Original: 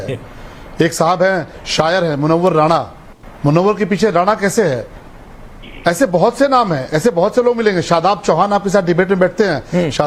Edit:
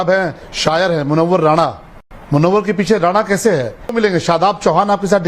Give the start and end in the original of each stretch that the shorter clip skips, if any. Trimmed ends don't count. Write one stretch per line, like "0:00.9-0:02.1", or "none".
0:05.0-0:07.5